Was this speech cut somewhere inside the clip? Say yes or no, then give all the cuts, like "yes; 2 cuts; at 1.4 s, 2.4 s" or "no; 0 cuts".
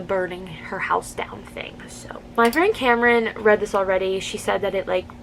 yes; 1 cut; at 2.2 s